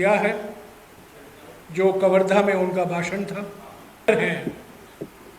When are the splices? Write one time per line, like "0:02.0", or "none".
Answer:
0:04.1